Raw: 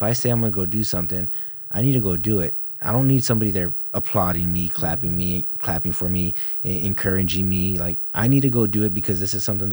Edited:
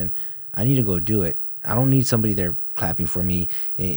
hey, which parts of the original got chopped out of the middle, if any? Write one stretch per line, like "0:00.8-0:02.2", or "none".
0:03.8-0:05.5